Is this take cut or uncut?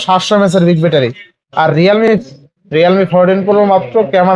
cut